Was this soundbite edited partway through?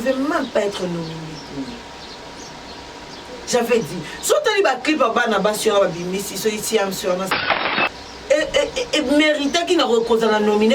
yes; 1 cut; at 7.6 s

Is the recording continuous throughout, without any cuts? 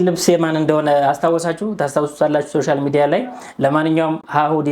yes; 0 cuts

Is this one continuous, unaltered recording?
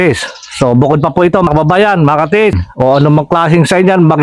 no; 2 cuts; at 1.5 s, 2.7 s

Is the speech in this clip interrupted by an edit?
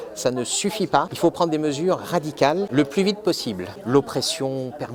yes; 3 cuts; at 1.1 s, 2.7 s, 3.7 s

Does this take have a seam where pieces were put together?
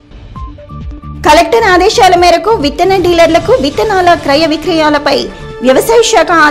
yes; 1 cut; at 1.0 s

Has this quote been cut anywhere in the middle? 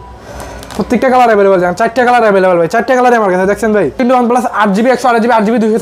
yes; 1 cut; at 4.0 s

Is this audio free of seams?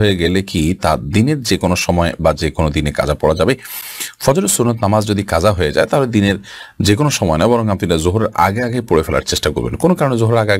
yes; 0 cuts

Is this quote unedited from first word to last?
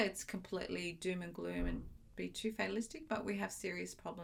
yes; 0 cuts

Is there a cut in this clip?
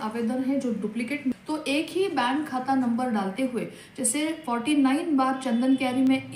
yes; 1 cut; at 1.3 s

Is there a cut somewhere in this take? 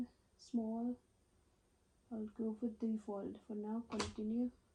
no; 0 cuts

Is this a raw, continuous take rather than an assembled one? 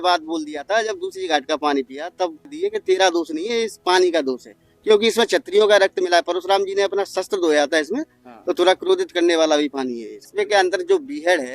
no; 2 cuts; at 2.5 s, 10.1 s

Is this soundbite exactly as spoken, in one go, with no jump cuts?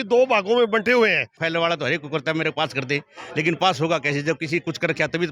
no; 1 cut; at 1.4 s

